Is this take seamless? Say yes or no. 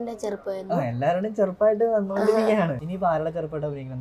no